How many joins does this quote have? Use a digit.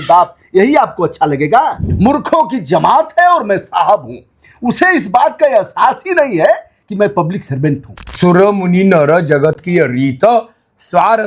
2